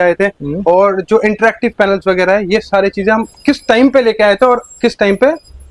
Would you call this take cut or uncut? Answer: uncut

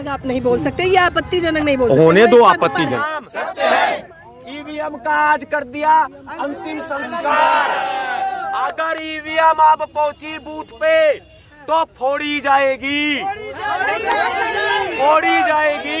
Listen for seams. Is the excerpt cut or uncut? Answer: cut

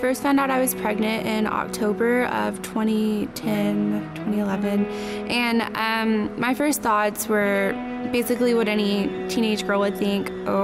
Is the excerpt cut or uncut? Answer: uncut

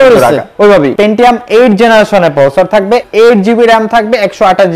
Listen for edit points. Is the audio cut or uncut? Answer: cut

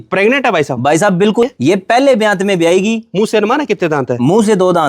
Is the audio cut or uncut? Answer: cut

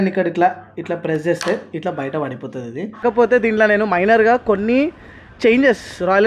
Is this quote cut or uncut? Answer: cut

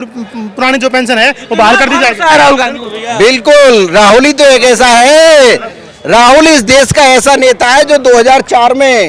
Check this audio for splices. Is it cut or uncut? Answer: uncut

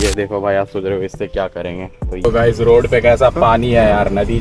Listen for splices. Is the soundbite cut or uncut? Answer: cut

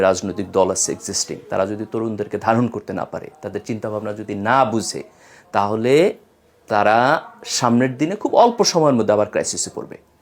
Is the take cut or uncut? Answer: uncut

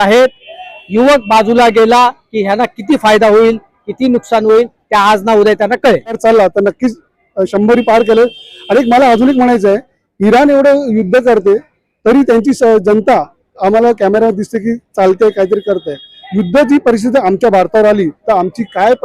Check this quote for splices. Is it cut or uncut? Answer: cut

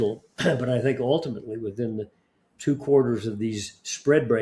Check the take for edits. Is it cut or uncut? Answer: uncut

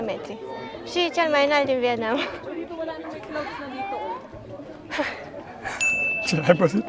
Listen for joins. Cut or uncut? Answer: uncut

